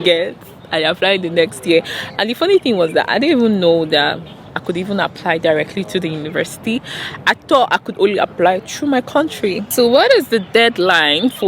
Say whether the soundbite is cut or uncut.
cut